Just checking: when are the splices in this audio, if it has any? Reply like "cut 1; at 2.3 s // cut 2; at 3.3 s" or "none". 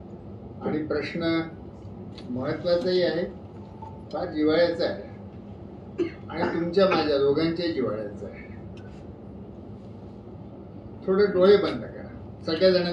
none